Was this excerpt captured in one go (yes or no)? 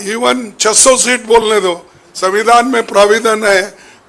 yes